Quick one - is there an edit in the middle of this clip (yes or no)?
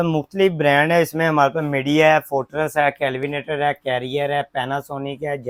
no